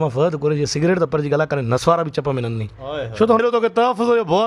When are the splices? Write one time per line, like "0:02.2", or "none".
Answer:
0:03.4

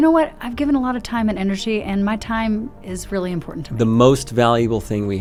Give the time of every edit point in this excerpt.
none

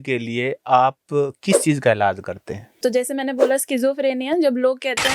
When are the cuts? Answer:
0:02.8

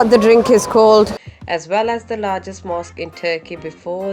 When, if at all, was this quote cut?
0:01.2

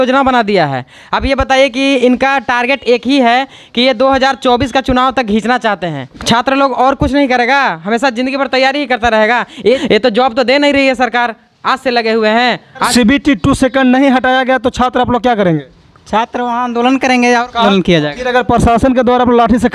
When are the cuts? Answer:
0:06.1
0:09.8
0:12.9
0:17.6

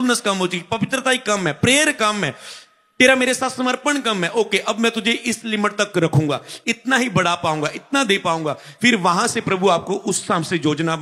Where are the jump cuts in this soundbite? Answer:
none

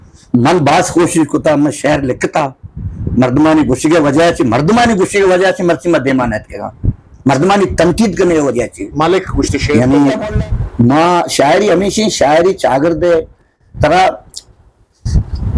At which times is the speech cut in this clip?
0:09.7

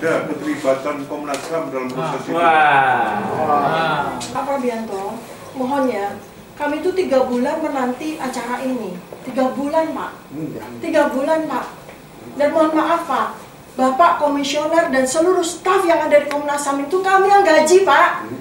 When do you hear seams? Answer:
0:04.2

